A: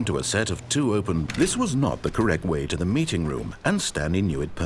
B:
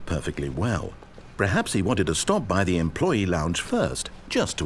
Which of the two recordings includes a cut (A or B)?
A